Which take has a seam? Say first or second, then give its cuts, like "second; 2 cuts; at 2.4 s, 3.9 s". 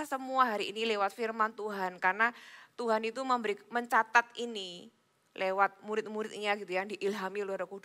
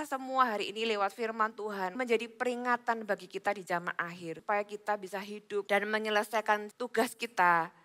second; 4 cuts; at 2.0 s, 4.3 s, 5.7 s, 6.8 s